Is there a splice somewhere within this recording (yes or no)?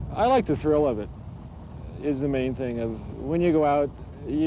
no